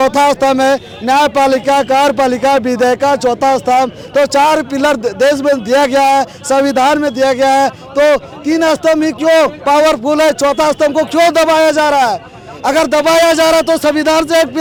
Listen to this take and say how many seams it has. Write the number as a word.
zero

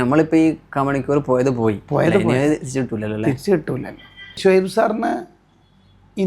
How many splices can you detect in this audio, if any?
one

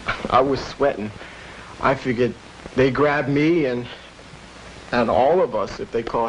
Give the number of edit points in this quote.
one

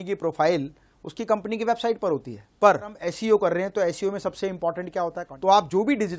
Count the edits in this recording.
two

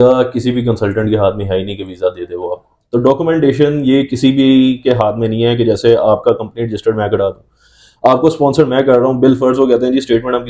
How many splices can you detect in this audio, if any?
one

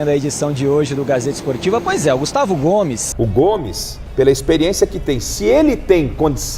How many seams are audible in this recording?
one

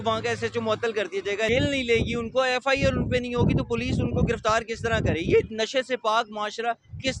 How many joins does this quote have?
one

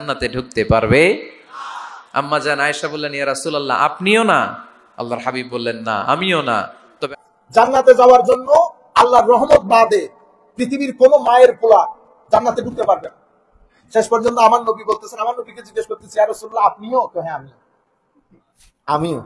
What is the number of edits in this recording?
one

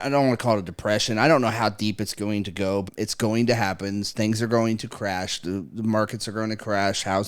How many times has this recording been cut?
one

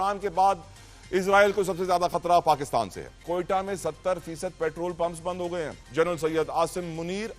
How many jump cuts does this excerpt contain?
two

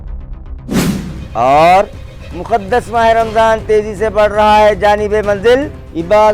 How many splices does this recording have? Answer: one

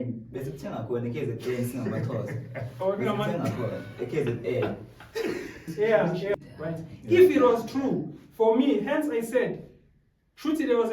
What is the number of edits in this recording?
one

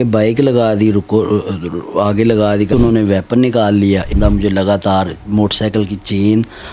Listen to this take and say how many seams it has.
two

